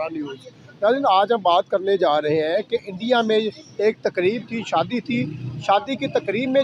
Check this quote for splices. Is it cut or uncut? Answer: uncut